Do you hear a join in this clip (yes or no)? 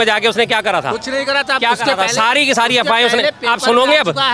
no